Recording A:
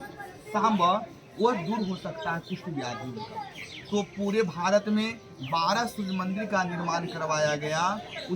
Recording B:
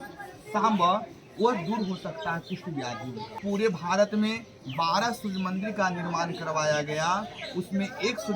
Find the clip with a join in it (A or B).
B